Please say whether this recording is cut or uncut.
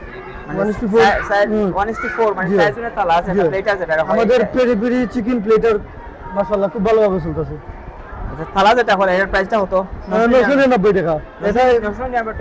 uncut